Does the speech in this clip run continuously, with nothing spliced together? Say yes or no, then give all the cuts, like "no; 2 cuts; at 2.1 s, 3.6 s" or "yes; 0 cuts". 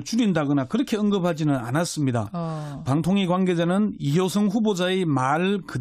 yes; 0 cuts